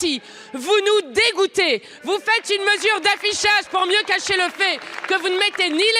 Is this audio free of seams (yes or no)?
yes